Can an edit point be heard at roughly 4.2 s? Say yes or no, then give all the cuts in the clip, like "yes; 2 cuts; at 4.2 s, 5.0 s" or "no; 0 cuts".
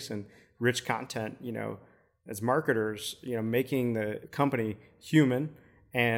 yes; 1 cut; at 4.2 s